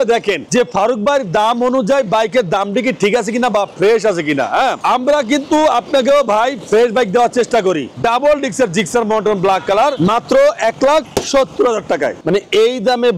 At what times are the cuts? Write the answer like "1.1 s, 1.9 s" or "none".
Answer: 7.9 s, 12.2 s

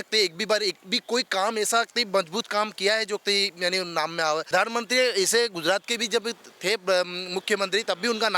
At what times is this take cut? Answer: 4.5 s

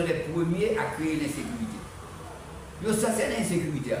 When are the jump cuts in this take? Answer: none

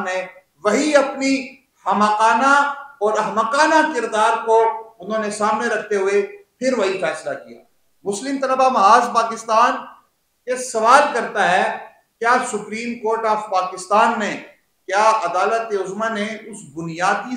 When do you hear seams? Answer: none

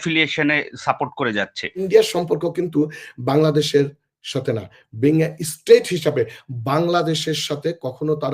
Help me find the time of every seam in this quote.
1.8 s

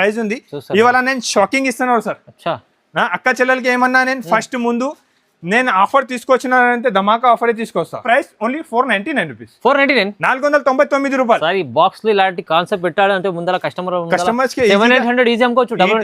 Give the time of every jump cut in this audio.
8.0 s

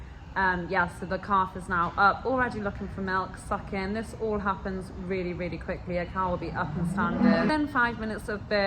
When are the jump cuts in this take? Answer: 7.5 s

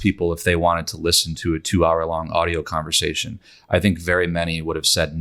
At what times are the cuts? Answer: none

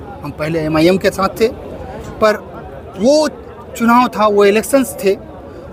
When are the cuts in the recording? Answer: none

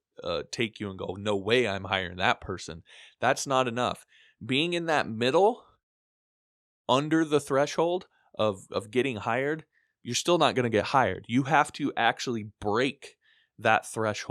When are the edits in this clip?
none

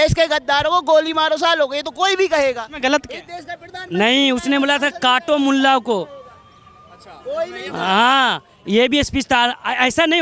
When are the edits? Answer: none

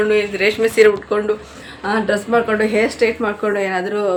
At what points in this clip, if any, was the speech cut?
none

